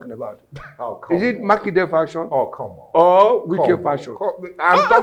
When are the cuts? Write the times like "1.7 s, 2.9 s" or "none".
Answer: none

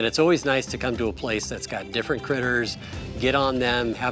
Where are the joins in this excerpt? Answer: none

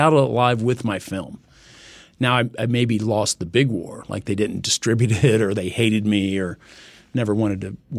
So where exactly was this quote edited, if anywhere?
none

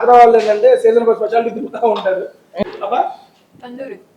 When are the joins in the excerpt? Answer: 2.5 s

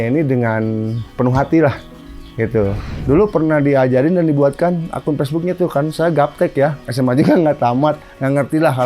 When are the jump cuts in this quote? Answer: 2.8 s

